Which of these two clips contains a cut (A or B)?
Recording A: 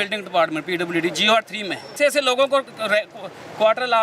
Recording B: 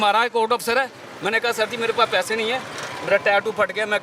A